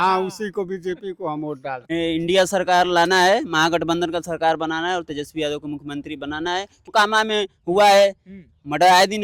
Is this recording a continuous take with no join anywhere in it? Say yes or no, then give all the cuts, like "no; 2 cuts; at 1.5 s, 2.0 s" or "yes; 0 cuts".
no; 2 cuts; at 1.8 s, 6.9 s